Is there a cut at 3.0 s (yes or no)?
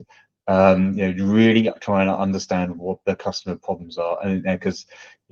no